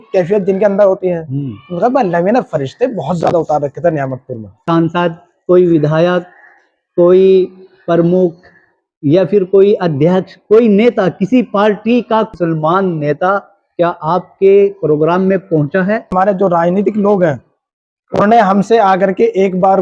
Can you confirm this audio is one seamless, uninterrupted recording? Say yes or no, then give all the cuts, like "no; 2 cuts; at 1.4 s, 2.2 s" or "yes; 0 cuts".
no; 3 cuts; at 4.5 s, 12.3 s, 16.1 s